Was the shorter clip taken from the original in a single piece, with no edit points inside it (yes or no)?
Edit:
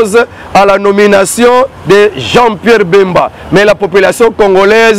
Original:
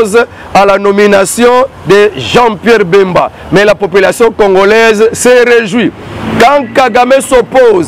yes